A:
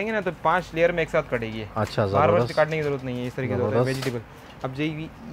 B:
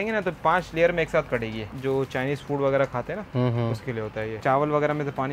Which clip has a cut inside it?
B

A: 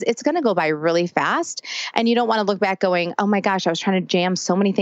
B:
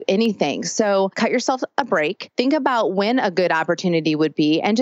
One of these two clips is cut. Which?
B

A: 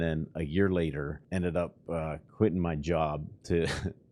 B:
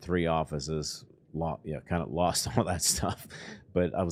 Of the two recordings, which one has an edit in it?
A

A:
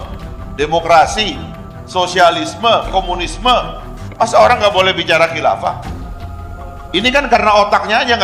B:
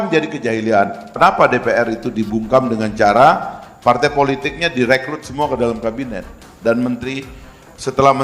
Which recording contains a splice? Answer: B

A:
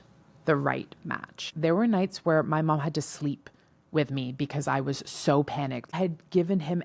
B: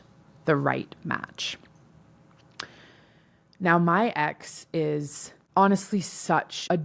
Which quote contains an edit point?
A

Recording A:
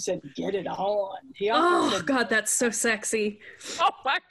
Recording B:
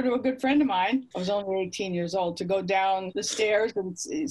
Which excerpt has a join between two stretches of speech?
B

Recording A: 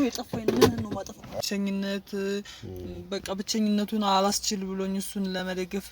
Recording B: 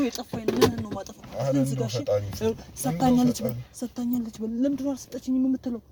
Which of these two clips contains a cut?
A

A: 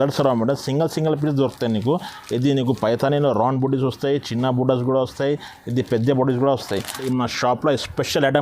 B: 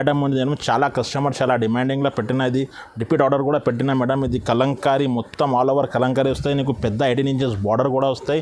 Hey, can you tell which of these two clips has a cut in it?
A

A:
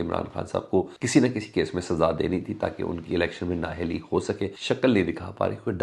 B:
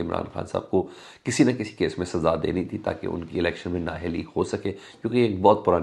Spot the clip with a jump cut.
A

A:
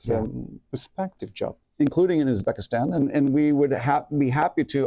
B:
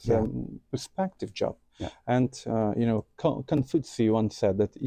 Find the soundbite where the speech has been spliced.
A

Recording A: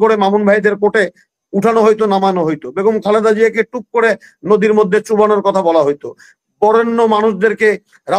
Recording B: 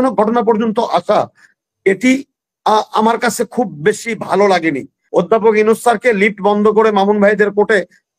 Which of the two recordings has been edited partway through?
B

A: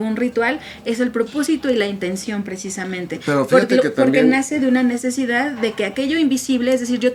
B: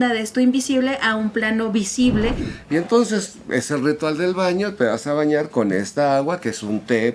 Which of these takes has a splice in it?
B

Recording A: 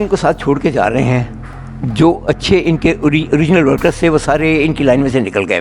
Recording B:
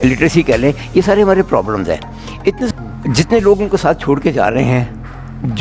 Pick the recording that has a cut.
B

